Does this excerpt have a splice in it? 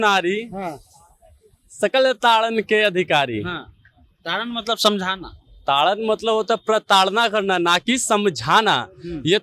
no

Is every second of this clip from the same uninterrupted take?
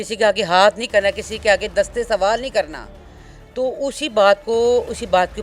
yes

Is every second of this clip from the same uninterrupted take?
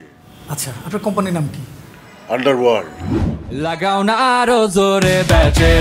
no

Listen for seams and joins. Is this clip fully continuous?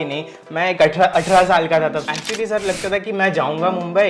no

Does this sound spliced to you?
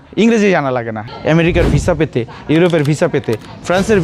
yes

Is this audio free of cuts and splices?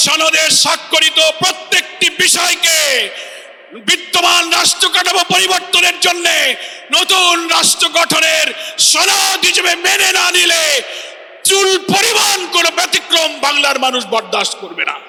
yes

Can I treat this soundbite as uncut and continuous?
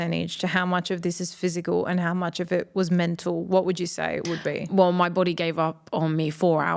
yes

